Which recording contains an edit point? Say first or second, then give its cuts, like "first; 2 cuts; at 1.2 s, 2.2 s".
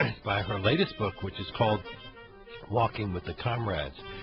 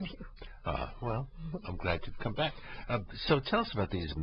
second; 1 cut; at 2.8 s